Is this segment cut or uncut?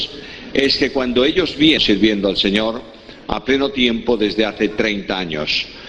uncut